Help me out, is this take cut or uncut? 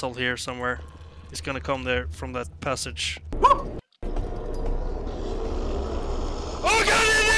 cut